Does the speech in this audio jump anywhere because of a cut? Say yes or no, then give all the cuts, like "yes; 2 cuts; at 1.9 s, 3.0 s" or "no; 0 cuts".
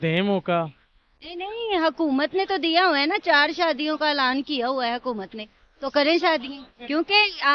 no; 0 cuts